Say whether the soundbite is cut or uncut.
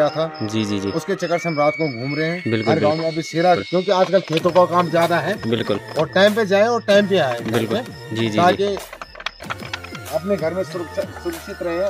cut